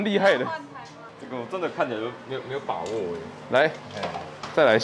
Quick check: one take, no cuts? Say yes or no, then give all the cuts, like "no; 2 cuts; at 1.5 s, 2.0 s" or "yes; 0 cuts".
no; 1 cut; at 1.2 s